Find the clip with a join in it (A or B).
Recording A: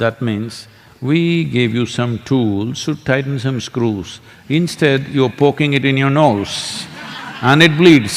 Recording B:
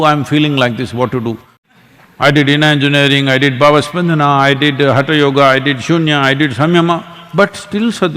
B